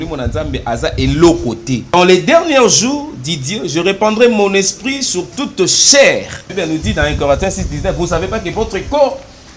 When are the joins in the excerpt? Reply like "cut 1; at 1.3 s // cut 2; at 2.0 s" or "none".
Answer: cut 1; at 1.8 s // cut 2; at 6.5 s